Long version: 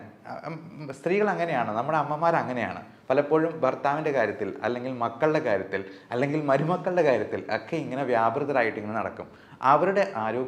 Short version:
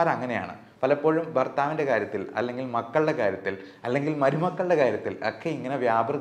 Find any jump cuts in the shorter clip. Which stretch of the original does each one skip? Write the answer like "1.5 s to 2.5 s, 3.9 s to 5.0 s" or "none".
none